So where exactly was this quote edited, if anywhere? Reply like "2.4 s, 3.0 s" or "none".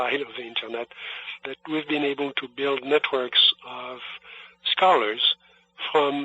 1.4 s